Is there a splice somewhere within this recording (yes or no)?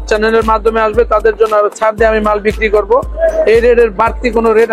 no